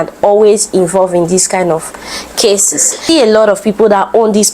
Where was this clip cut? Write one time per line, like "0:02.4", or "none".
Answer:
0:03.0